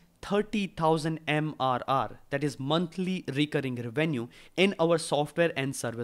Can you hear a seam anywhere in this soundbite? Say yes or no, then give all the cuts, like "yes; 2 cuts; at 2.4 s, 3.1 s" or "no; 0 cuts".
no; 0 cuts